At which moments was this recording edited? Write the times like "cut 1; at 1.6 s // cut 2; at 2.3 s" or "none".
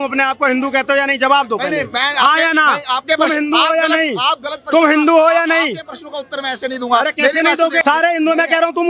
cut 1; at 7.8 s